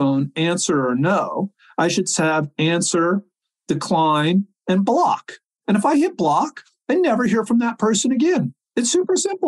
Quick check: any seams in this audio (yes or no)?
yes